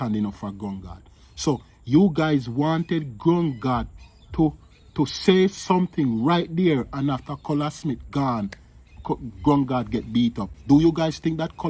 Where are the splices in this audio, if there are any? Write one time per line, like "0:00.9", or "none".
0:10.5